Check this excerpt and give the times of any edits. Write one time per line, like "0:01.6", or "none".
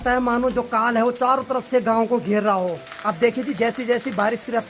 none